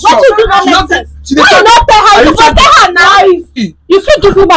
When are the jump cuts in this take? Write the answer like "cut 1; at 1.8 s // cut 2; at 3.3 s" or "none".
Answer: cut 1; at 3.6 s